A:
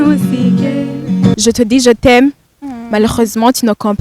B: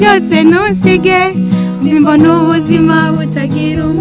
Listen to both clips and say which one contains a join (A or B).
A